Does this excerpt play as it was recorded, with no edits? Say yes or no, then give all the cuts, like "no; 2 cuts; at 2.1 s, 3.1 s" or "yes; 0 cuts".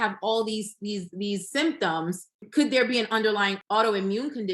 no; 2 cuts; at 2.5 s, 3.6 s